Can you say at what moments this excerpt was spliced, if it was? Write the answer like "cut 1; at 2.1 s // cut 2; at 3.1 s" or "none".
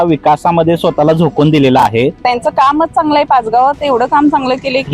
cut 1; at 2.2 s